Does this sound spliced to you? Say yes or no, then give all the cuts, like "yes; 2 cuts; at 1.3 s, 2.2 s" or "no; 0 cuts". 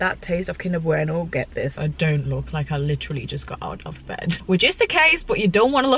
yes; 2 cuts; at 1.8 s, 4.4 s